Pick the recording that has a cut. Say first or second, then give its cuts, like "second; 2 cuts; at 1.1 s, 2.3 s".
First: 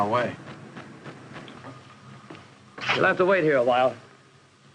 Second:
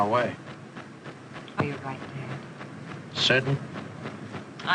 second; 1 cut; at 1.6 s